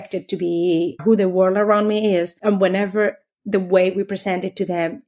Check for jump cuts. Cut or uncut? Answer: cut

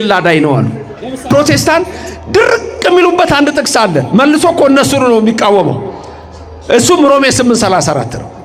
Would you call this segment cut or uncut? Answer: cut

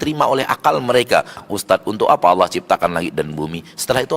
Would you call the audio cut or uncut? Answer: cut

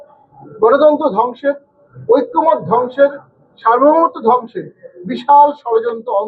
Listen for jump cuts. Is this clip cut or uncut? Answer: uncut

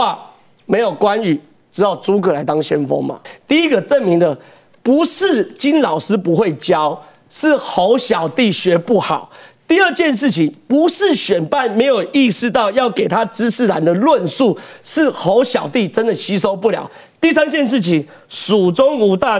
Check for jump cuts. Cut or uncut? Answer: cut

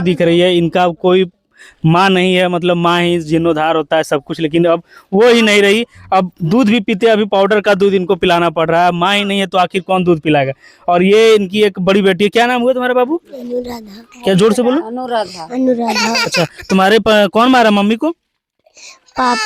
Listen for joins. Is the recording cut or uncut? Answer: uncut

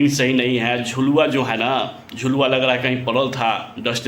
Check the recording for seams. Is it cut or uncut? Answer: uncut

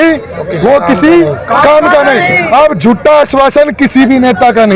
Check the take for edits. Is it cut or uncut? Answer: uncut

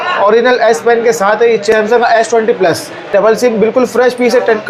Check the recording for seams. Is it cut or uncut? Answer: cut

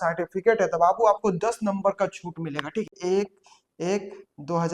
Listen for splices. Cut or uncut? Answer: cut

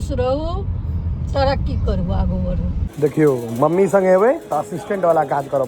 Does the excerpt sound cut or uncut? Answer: cut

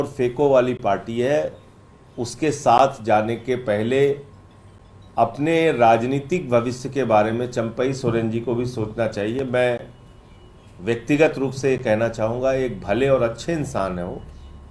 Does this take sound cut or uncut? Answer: uncut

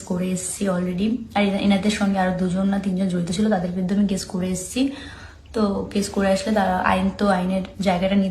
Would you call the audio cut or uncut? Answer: cut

